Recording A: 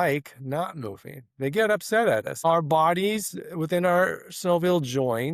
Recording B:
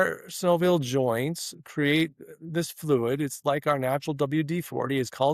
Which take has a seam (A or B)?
A